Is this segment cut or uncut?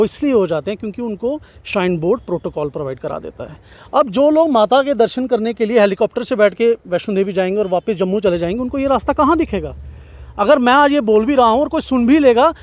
uncut